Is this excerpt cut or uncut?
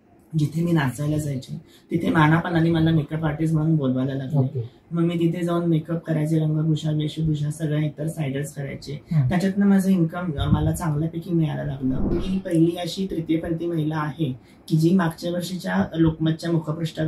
cut